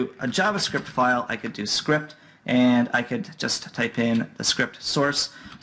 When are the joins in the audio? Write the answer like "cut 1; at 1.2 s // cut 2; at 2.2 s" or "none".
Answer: cut 1; at 4.4 s